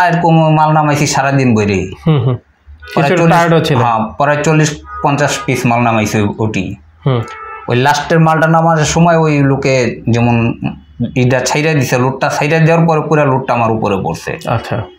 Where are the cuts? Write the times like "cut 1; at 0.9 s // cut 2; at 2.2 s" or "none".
none